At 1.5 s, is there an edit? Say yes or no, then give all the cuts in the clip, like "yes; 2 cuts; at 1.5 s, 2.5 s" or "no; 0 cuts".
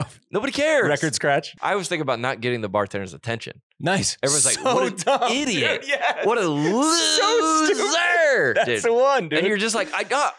yes; 1 cut; at 1.5 s